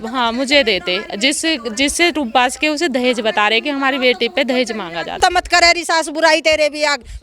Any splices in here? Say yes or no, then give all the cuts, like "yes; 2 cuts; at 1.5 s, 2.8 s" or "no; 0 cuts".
yes; 1 cut; at 5.1 s